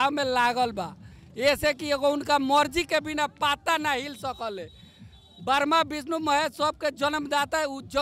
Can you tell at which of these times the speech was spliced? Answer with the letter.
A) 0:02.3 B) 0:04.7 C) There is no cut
C